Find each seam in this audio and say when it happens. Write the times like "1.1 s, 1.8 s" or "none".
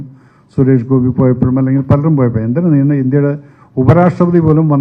none